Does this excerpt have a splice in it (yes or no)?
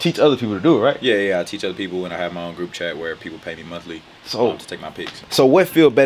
no